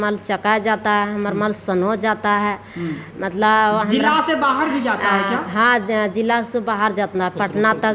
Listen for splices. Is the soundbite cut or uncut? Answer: uncut